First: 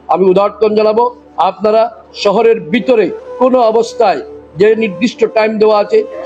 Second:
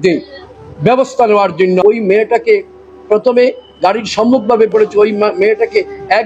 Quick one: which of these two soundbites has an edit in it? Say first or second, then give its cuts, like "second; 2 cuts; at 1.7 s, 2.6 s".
second; 1 cut; at 1.8 s